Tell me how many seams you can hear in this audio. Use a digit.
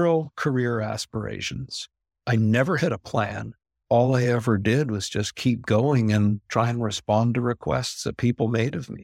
0